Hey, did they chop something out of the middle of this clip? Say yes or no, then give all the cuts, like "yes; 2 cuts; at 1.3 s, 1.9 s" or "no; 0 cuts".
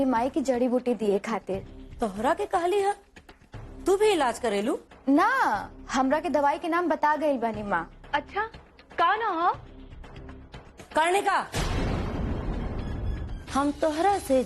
yes; 1 cut; at 13.3 s